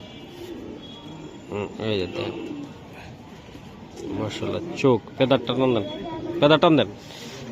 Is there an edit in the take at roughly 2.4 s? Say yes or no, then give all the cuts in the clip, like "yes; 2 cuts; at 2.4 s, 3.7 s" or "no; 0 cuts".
no; 0 cuts